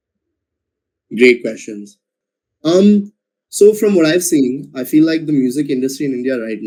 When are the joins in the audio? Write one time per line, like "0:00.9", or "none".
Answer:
none